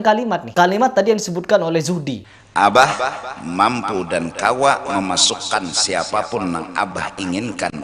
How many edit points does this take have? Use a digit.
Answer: 1